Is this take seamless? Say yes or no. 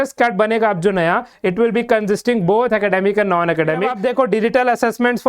no